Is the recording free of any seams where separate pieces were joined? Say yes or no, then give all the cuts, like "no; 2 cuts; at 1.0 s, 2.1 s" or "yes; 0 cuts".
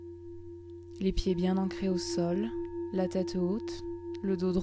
no; 1 cut; at 1.0 s